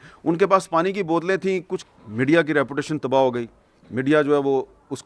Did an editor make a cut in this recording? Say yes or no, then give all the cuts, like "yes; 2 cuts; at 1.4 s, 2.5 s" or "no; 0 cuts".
yes; 1 cut; at 1.7 s